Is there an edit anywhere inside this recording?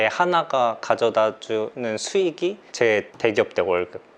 no; 0 cuts

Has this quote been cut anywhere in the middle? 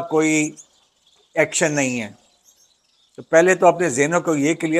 no; 0 cuts

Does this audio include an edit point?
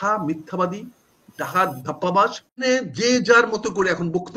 yes; 1 cut; at 2.6 s

